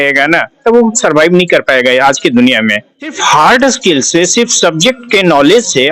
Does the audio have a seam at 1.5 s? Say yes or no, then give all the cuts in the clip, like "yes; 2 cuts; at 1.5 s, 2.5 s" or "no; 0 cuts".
no; 1 cut; at 3.2 s